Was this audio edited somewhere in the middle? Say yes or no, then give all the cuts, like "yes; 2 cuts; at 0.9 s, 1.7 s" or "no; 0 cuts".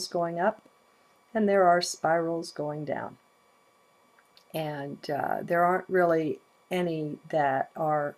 yes; 1 cut; at 5.6 s